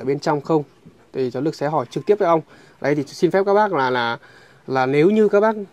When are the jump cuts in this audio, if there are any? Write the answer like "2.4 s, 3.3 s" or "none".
none

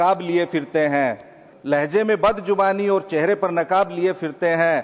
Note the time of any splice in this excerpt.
none

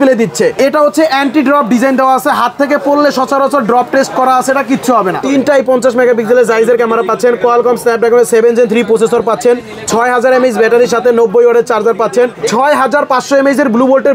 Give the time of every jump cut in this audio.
5.2 s, 12.4 s

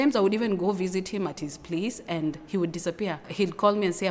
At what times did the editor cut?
none

